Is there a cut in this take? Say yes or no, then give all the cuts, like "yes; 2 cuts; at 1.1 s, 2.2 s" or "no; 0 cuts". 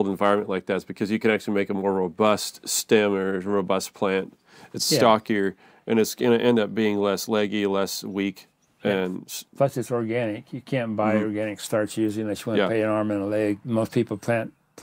yes; 1 cut; at 13.6 s